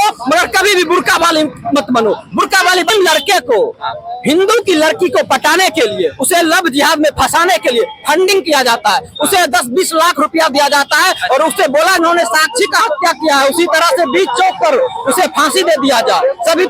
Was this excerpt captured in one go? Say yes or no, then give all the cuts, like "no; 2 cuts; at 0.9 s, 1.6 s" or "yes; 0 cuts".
no; 2 cuts; at 2.9 s, 12.0 s